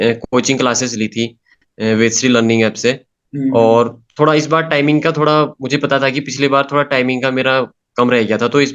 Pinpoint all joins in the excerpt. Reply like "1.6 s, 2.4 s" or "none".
none